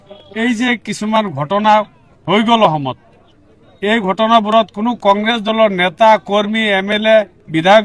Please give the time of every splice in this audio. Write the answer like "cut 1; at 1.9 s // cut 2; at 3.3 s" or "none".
none